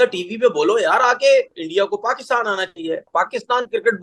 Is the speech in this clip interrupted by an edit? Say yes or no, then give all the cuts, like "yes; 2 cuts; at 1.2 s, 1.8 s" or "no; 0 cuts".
yes; 2 cuts; at 1.6 s, 3.0 s